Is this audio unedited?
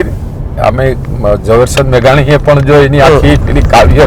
yes; 0 cuts

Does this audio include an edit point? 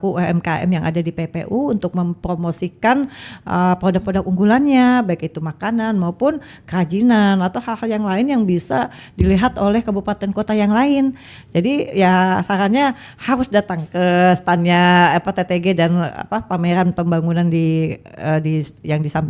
no; 0 cuts

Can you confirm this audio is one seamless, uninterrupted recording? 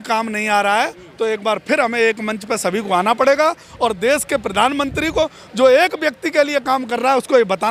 yes; 0 cuts

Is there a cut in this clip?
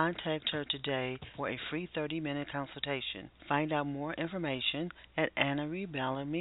no; 0 cuts

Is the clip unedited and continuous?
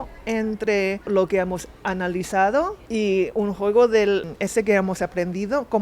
no; 3 cuts; at 1.1 s, 2.8 s, 4.3 s

